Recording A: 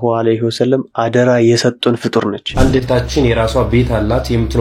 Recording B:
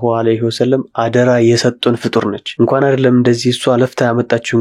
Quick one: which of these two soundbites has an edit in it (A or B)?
A